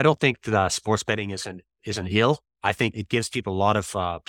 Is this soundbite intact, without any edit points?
no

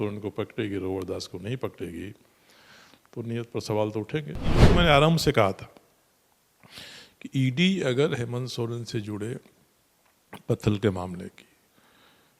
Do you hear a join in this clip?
yes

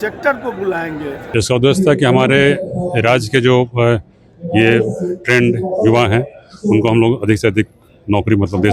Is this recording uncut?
no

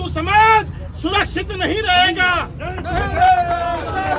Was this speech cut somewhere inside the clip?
no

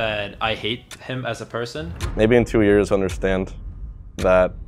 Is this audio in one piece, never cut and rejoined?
no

